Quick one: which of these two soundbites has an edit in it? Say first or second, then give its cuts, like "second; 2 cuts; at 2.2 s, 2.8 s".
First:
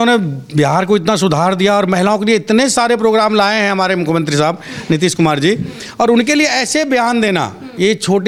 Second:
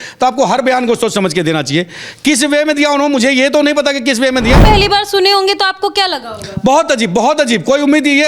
second; 1 cut; at 4.6 s